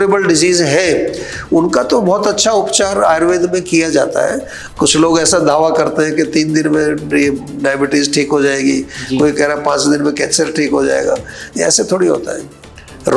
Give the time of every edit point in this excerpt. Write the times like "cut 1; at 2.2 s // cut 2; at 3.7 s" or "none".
cut 1; at 4.6 s